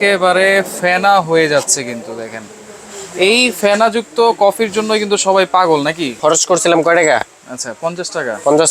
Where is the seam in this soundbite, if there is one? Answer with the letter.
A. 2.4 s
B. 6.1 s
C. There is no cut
B